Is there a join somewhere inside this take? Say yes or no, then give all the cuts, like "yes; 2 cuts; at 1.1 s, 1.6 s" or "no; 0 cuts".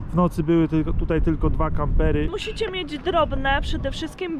yes; 1 cut; at 2.3 s